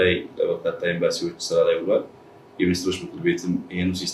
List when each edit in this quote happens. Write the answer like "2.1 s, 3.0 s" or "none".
none